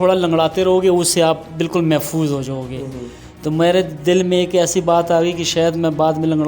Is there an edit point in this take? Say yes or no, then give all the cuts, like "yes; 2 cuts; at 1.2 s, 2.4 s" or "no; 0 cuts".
no; 0 cuts